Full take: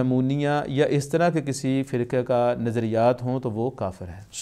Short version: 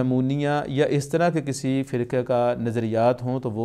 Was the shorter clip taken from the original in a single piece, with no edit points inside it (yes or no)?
yes